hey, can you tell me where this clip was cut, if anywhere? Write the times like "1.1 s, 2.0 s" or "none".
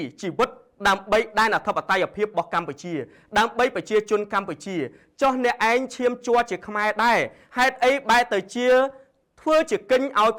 none